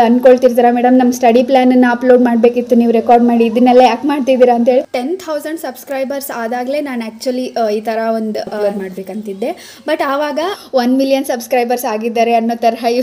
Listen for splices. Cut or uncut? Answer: cut